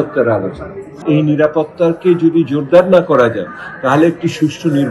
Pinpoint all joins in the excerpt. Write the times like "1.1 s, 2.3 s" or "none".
1.0 s